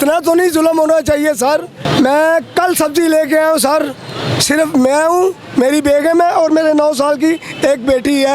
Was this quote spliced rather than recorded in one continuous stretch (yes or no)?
yes